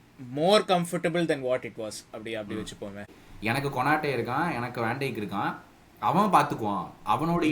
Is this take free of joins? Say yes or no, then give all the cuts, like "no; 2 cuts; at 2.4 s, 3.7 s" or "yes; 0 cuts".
no; 1 cut; at 3.2 s